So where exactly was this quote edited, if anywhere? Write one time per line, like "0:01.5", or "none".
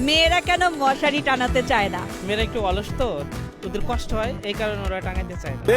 0:02.1